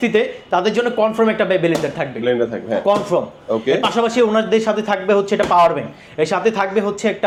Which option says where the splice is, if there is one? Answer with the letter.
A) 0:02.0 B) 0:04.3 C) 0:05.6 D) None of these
D